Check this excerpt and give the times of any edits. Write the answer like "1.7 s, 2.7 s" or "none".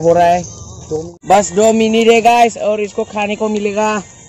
1.1 s